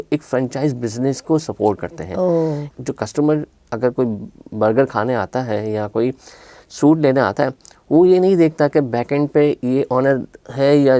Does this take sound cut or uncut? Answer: cut